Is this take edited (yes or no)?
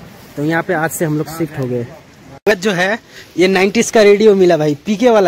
yes